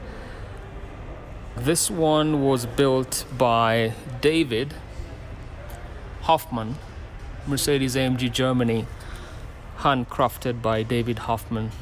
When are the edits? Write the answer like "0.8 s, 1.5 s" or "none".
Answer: 1.6 s